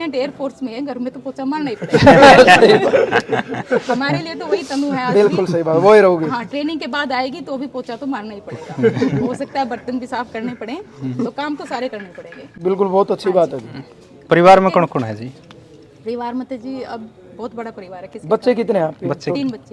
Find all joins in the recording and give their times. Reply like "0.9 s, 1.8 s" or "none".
none

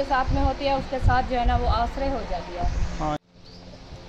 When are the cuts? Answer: 3.2 s

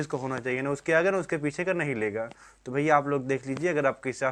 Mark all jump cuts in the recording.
none

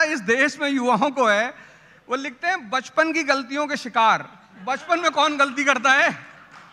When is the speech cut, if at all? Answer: none

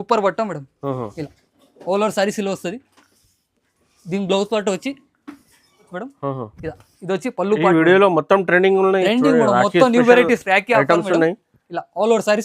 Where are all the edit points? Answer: 5.9 s

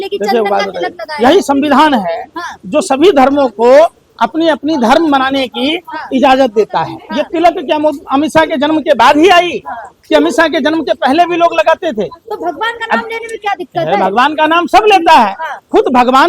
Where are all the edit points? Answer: 7.0 s

